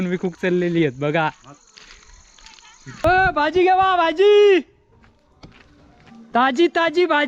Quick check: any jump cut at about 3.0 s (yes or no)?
yes